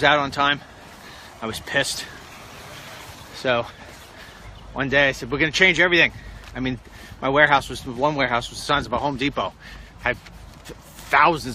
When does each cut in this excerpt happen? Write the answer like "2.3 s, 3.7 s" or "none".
6.7 s